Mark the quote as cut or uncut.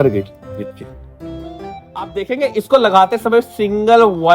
cut